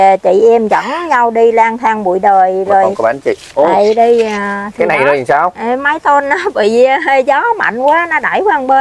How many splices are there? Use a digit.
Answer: 1